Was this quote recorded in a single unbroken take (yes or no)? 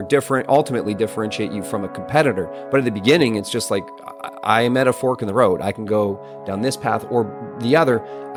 yes